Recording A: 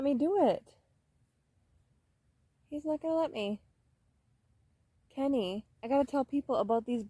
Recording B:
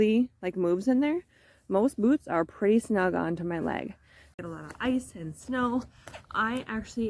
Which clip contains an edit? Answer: B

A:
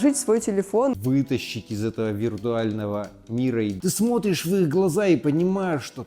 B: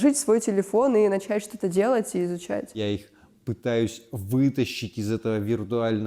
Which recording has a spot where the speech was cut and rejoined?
A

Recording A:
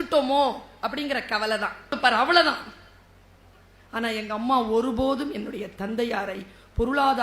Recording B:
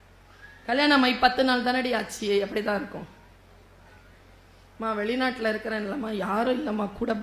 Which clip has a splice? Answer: A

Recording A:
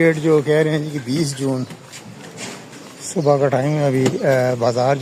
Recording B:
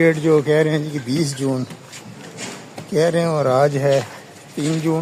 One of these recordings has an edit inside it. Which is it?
A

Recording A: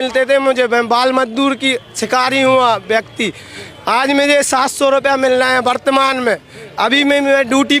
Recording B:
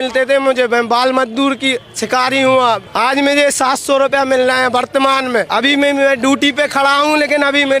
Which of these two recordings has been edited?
B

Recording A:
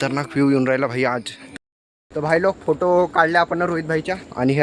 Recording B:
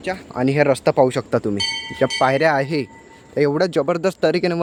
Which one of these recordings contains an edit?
A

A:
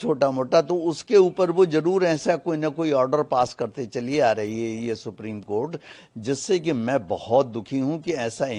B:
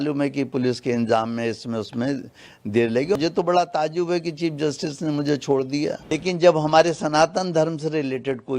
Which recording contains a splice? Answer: B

